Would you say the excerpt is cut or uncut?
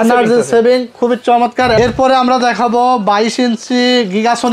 cut